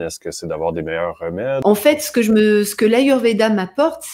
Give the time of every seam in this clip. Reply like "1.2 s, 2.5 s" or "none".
1.6 s